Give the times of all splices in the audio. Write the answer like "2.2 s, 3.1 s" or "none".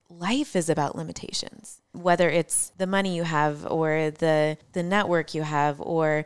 1.9 s, 2.6 s, 4.7 s